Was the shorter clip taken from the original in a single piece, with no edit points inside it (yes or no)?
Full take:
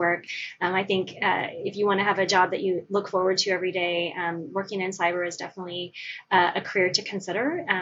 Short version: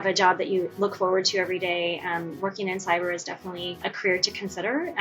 no